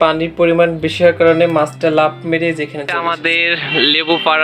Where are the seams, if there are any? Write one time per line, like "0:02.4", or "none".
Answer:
0:02.8